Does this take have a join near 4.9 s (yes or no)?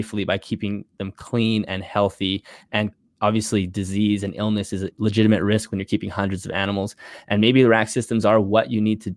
yes